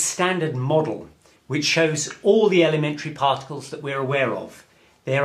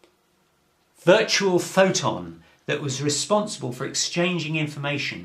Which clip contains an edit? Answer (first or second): second